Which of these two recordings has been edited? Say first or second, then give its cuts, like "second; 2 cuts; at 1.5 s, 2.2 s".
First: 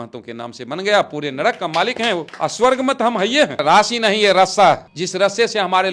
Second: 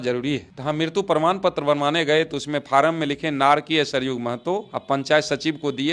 first; 3 cuts; at 2.3 s, 3.6 s, 5.0 s